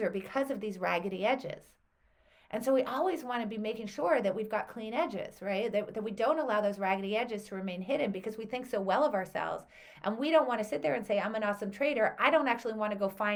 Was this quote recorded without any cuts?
yes; 0 cuts

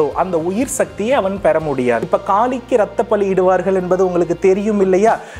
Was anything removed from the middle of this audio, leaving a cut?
yes; 1 cut; at 2.0 s

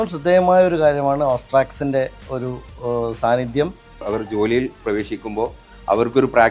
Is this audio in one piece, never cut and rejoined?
no; 1 cut; at 4.0 s

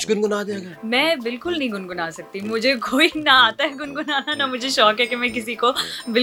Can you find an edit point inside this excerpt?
no; 0 cuts

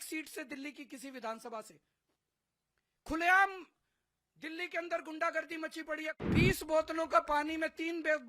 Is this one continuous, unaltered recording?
no; 1 cut; at 6.1 s

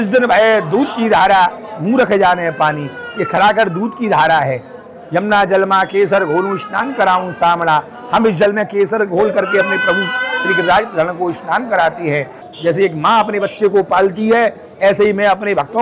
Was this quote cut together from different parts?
yes; 1 cut; at 12.4 s

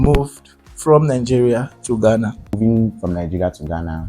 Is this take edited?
yes; 1 cut; at 2.5 s

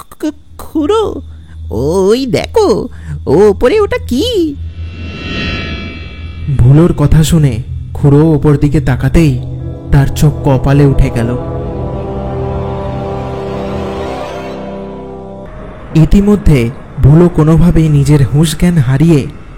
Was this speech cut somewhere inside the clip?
yes; 1 cut; at 15.4 s

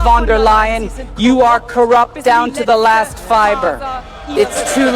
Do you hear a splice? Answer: no; 0 cuts

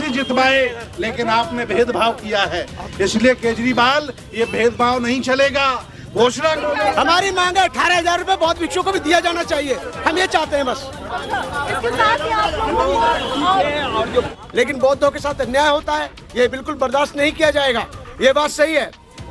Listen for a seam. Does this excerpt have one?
yes; 2 cuts; at 6.6 s, 14.3 s

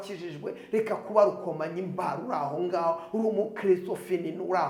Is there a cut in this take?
no; 0 cuts

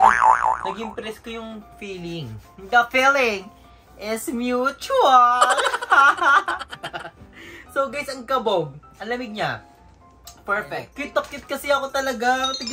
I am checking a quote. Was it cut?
yes; 1 cut; at 10.8 s

